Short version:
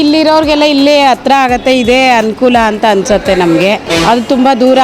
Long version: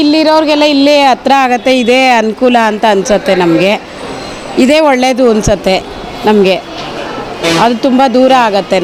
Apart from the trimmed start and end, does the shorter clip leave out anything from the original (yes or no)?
yes